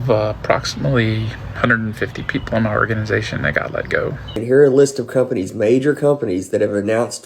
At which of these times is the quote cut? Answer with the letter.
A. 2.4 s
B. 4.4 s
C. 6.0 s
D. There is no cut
B